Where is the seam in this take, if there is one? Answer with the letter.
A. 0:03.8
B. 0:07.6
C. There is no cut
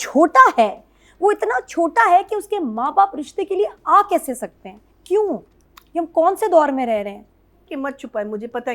B